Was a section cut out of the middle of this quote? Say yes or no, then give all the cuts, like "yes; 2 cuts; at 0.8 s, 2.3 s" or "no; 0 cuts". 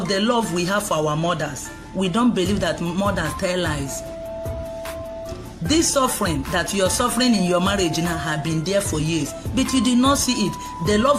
no; 0 cuts